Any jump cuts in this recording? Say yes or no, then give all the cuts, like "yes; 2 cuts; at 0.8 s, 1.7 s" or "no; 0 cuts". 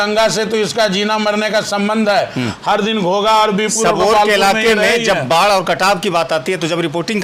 no; 0 cuts